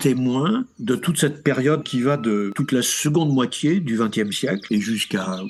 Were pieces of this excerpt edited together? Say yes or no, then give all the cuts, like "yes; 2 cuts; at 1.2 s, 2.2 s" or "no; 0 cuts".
no; 0 cuts